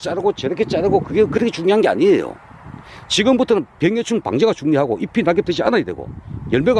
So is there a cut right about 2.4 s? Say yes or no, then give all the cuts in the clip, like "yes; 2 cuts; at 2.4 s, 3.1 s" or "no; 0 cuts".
no; 0 cuts